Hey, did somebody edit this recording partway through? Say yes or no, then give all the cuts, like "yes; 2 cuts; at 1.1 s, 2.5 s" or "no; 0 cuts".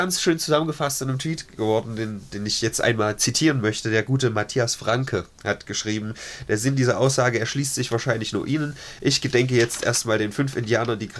no; 0 cuts